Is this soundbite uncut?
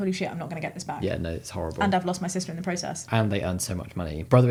yes; 0 cuts

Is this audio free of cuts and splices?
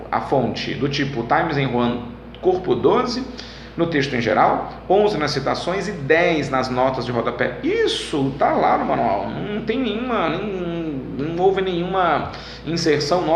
no; 1 cut; at 6.8 s

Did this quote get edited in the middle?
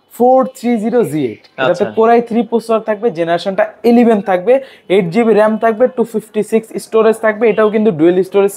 no; 0 cuts

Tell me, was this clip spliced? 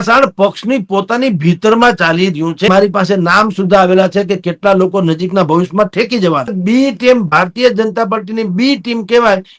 yes; 2 cuts; at 2.7 s, 6.6 s

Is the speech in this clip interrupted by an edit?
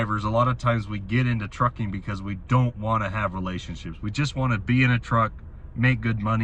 no; 0 cuts

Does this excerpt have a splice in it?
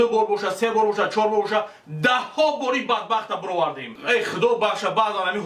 yes; 1 cut; at 3.9 s

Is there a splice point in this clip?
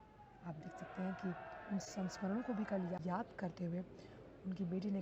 yes; 1 cut; at 3.0 s

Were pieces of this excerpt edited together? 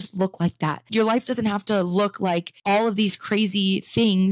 yes; 2 cuts; at 0.9 s, 2.5 s

